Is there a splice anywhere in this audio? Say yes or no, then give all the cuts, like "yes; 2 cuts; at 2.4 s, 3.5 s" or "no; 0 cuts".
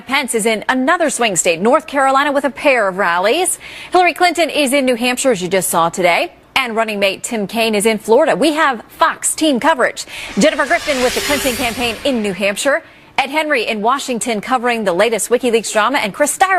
no; 0 cuts